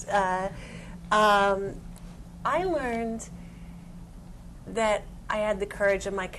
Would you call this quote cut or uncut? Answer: cut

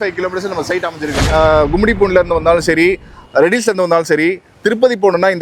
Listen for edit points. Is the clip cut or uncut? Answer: cut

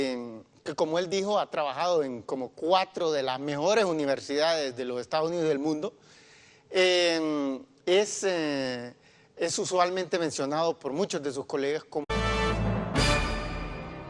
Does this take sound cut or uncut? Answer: uncut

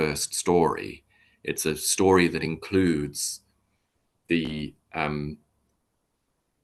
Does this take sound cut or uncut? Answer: uncut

